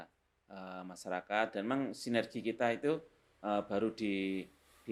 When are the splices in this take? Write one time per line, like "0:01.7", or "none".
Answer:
none